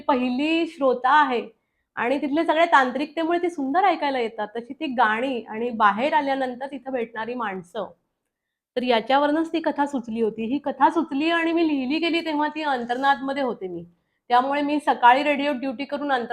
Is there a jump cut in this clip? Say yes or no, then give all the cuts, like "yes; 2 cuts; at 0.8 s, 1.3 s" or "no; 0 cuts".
no; 0 cuts